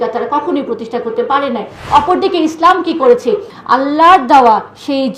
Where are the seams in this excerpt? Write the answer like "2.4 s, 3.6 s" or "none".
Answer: 1.8 s, 3.5 s